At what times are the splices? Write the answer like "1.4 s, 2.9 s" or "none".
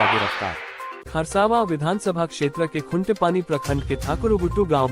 1.0 s